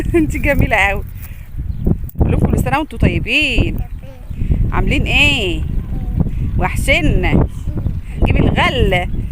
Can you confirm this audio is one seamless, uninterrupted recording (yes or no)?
no